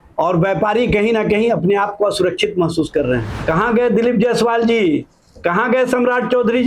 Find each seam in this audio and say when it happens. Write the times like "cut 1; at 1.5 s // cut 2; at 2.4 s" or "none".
cut 1; at 3.3 s

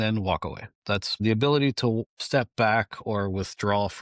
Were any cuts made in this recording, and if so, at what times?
cut 1; at 1.2 s

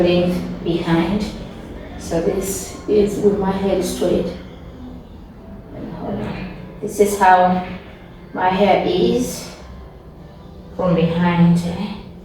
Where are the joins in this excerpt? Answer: none

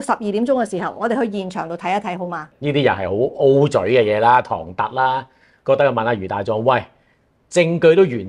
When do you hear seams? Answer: cut 1; at 2.5 s

